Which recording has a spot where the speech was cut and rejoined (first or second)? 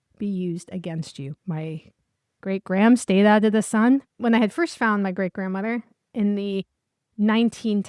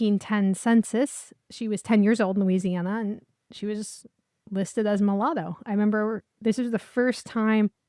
first